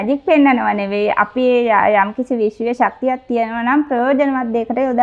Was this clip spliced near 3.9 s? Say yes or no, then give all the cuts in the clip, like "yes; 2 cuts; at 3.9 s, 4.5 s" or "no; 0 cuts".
no; 0 cuts